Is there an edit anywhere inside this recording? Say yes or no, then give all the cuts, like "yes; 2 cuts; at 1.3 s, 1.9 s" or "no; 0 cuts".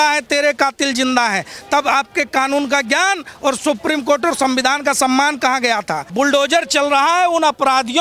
yes; 1 cut; at 6.1 s